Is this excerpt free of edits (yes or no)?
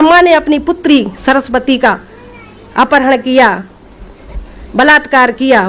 yes